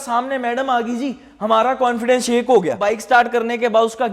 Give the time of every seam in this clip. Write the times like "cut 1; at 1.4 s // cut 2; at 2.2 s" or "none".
cut 1; at 2.9 s